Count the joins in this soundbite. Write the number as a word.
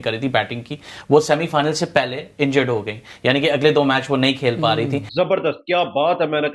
one